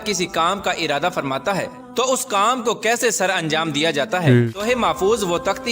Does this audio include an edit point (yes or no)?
yes